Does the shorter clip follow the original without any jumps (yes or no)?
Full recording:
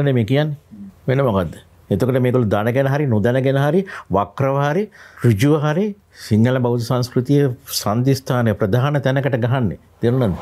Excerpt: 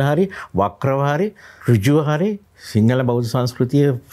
yes